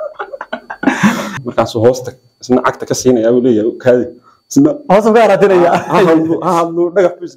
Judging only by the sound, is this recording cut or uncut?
cut